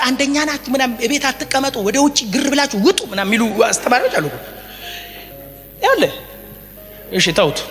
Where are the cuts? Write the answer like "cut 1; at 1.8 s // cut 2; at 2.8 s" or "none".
none